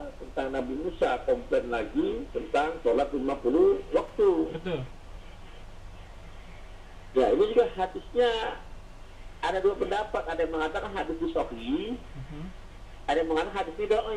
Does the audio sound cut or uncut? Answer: uncut